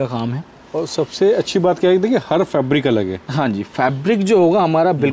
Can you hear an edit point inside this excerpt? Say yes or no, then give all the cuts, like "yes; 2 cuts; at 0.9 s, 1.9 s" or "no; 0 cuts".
no; 0 cuts